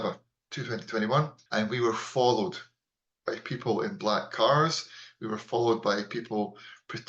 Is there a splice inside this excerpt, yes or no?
yes